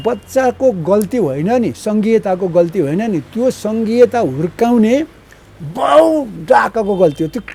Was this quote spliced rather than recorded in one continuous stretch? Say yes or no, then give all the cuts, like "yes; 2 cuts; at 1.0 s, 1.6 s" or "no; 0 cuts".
no; 0 cuts